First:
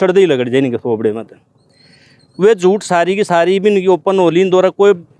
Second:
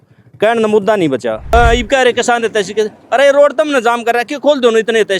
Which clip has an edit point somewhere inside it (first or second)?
second